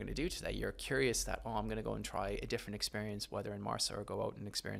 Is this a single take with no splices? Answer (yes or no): yes